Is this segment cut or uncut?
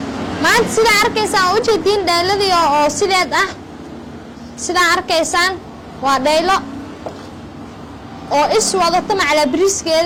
uncut